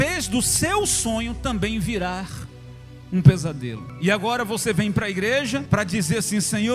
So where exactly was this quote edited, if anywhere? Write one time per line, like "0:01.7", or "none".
0:03.8
0:05.6